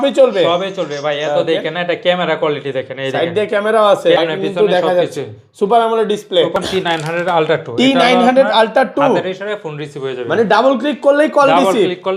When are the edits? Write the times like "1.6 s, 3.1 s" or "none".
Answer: 4.2 s, 6.5 s